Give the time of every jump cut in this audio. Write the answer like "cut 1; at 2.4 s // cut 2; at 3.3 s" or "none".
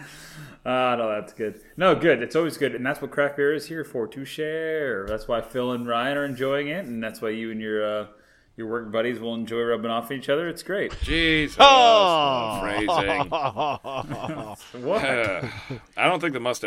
none